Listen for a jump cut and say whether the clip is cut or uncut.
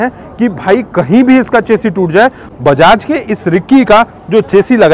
cut